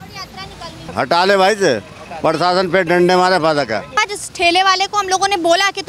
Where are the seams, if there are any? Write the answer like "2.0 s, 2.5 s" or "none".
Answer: 0.8 s, 3.9 s